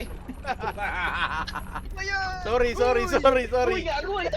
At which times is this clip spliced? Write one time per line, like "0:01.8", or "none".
0:02.0